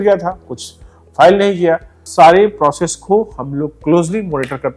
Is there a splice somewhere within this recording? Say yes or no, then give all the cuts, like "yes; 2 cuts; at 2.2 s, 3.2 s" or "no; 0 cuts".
yes; 1 cut; at 2.0 s